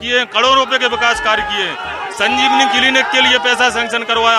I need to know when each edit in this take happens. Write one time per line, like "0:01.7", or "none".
none